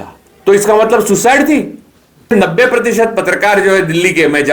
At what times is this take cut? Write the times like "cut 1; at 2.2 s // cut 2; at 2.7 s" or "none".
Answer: cut 1; at 2.3 s

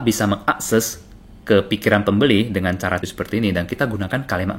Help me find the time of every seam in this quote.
cut 1; at 3.0 s

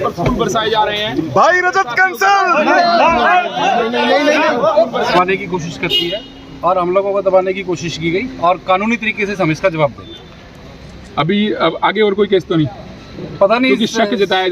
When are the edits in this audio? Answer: cut 1; at 5.1 s

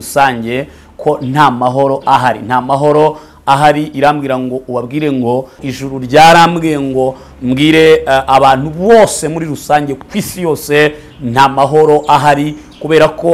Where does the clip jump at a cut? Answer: cut 1; at 5.6 s

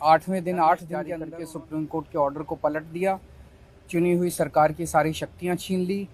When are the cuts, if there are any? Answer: cut 1; at 1.2 s

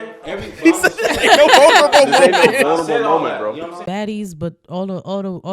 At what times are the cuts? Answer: cut 1; at 3.8 s

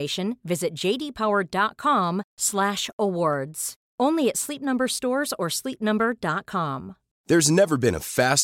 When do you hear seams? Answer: none

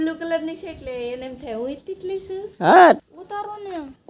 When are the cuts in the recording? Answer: cut 1; at 3.0 s

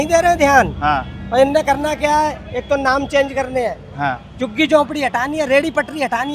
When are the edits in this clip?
none

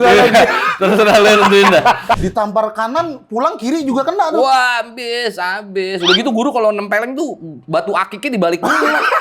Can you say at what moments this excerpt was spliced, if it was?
cut 1; at 2.2 s

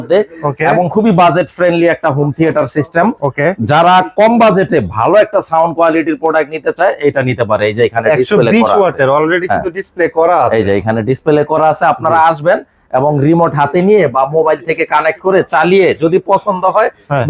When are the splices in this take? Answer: none

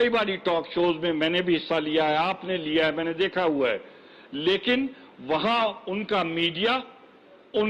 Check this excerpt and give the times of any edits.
cut 1; at 3.0 s

